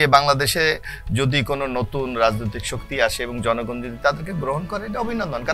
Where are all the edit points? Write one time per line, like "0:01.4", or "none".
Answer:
none